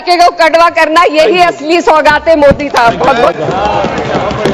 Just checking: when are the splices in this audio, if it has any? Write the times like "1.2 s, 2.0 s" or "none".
none